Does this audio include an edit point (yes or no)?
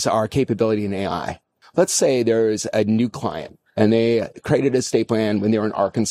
yes